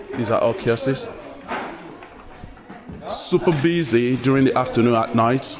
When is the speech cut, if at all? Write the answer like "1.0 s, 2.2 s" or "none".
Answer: none